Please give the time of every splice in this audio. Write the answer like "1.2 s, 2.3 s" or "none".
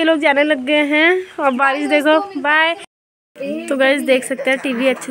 2.9 s